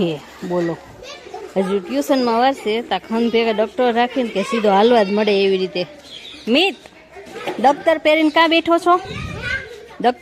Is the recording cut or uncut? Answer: uncut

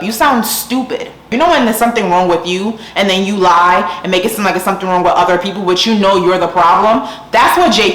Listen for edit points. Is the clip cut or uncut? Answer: cut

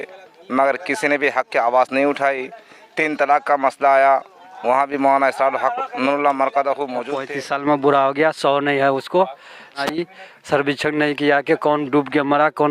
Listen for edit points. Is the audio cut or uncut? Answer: cut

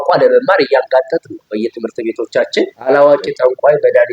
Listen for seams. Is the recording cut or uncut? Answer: cut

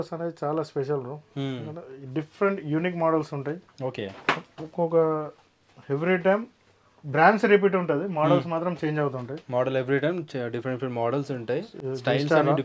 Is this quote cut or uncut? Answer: uncut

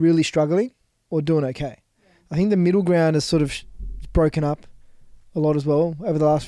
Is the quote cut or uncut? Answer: uncut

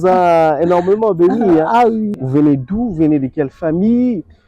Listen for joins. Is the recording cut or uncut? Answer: cut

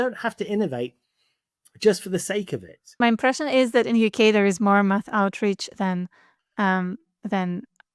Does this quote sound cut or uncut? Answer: cut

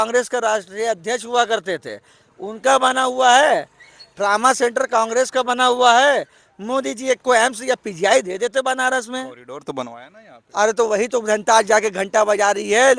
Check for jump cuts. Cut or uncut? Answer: uncut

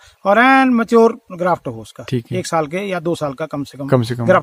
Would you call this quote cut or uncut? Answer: uncut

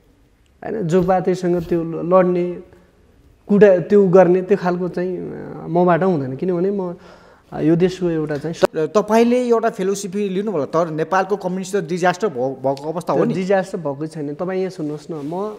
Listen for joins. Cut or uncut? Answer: cut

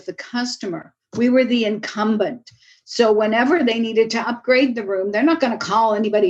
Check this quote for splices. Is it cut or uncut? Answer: uncut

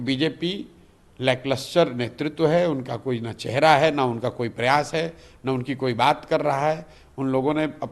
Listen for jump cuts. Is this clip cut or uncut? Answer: uncut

